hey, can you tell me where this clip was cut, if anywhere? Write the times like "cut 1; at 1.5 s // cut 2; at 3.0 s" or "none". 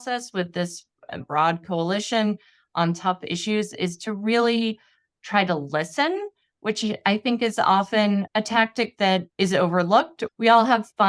cut 1; at 1.3 s // cut 2; at 8.3 s // cut 3; at 9.3 s // cut 4; at 10.2 s

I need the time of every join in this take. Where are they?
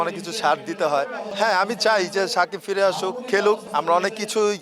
cut 1; at 1.2 s // cut 2; at 3.6 s

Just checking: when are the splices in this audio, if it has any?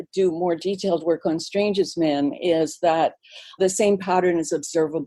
cut 1; at 3.6 s

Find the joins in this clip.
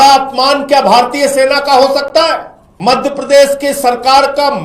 cut 1; at 2.6 s

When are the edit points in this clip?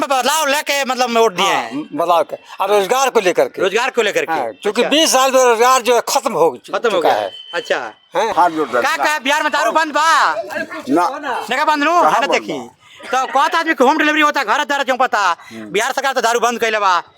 cut 1; at 8.3 s

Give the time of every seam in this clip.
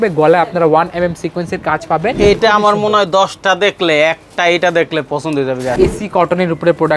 cut 1; at 2.2 s // cut 2; at 5.7 s

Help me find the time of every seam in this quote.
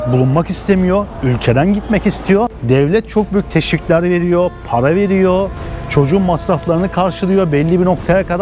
cut 1; at 2.6 s

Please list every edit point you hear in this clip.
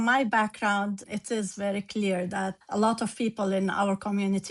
cut 1; at 1.0 s // cut 2; at 2.6 s

